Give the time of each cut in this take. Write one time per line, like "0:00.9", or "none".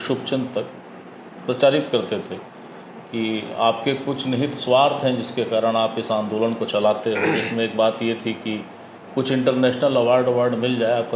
none